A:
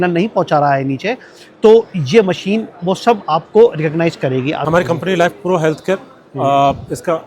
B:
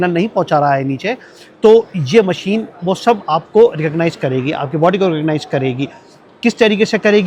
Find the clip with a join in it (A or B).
A